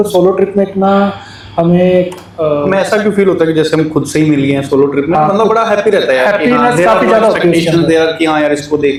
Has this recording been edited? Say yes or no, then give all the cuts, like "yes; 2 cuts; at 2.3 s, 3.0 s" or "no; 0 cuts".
no; 0 cuts